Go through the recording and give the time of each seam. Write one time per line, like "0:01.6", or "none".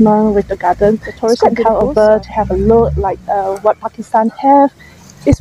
0:01.8